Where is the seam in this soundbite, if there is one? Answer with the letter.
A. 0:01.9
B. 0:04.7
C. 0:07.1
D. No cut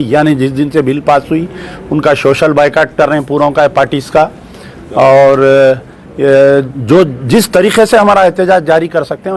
D